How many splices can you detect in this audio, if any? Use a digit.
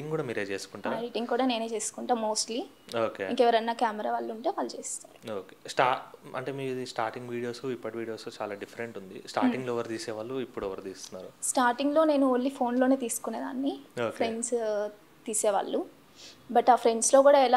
0